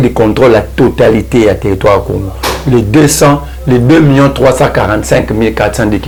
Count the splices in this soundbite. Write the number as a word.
zero